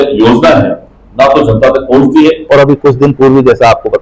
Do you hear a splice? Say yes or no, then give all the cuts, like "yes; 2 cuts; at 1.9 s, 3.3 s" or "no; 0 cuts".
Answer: yes; 1 cut; at 2.4 s